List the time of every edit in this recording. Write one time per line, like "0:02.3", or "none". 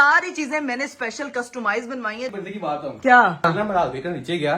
0:02.3
0:03.4